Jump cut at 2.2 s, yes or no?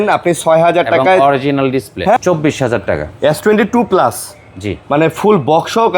yes